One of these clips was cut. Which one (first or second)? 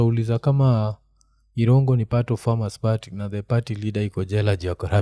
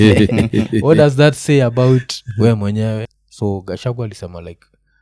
second